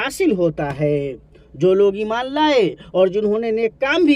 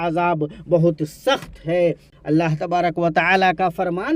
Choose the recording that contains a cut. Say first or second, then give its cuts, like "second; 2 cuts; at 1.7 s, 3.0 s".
second; 1 cut; at 2.1 s